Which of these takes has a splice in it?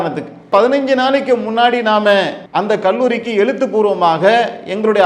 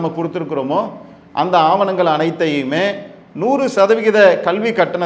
first; 1 cut; at 2.4 s

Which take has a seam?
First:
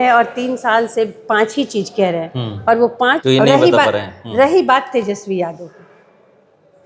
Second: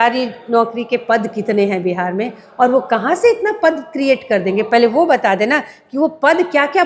first; 1 cut; at 3.2 s

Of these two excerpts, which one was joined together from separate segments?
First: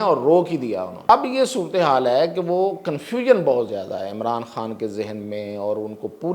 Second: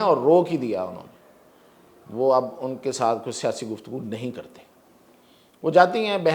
first; 1 cut; at 1.0 s

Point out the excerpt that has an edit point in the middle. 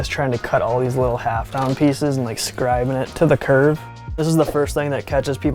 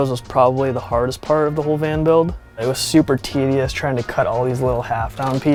first; 2 cuts; at 3.1 s, 4.0 s

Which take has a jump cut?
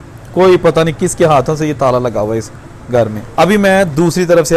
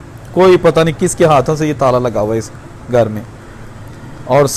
first; 1 cut; at 3.2 s

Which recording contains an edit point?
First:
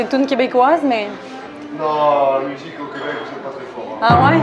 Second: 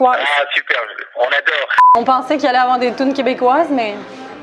second; 1 cut; at 1.8 s

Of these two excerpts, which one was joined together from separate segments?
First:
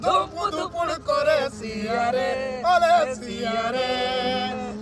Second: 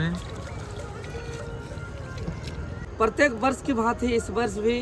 second; 1 cut; at 2.9 s

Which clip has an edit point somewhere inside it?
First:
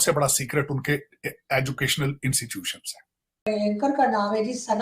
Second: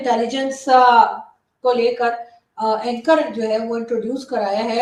first; 1 cut; at 3.5 s

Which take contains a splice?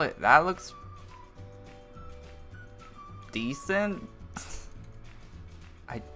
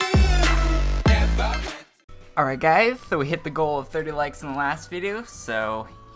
second; 1 cut; at 3.2 s

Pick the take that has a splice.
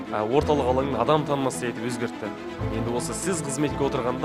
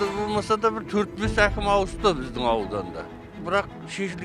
second; 1 cut; at 3.3 s

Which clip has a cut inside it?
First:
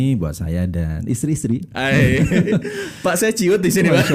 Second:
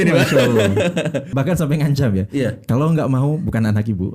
second; 1 cut; at 1.3 s

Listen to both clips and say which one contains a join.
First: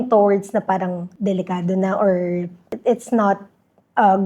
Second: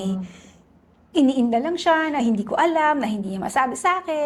first; 2 cuts; at 1.1 s, 2.7 s

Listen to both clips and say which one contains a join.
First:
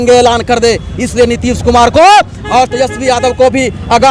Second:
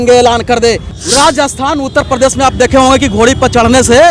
second; 1 cut; at 0.9 s

